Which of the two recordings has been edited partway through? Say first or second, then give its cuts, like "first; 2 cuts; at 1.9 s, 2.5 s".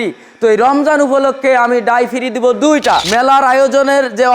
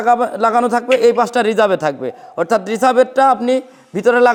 first; 1 cut; at 3.1 s